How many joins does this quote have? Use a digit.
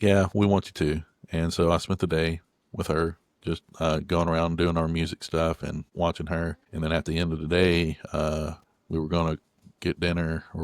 2